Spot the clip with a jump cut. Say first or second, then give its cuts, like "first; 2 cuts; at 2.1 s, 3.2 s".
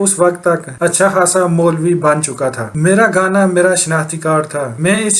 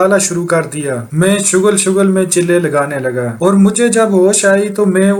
first; 1 cut; at 2.6 s